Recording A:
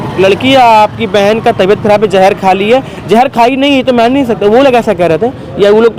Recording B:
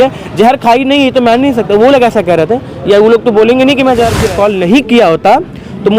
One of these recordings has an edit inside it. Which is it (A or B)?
B